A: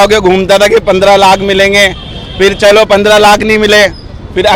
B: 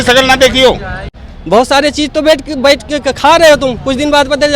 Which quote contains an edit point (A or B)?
B